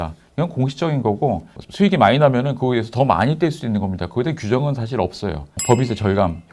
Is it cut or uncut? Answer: cut